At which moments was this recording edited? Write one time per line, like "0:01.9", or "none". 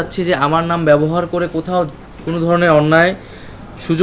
none